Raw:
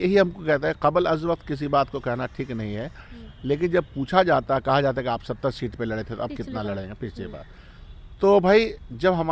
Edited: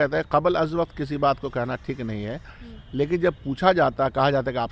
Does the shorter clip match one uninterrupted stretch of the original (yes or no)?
yes